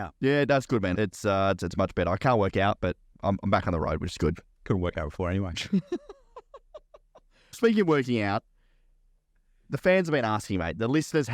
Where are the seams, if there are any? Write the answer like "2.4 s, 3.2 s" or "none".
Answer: 0.9 s, 3.1 s, 7.6 s